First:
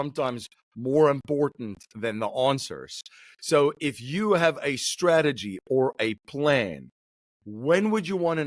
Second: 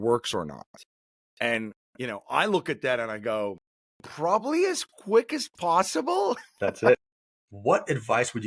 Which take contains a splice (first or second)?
second